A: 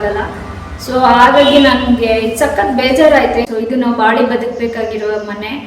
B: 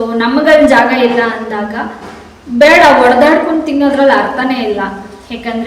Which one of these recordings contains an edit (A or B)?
A